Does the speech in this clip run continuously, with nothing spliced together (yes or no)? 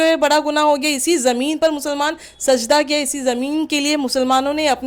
yes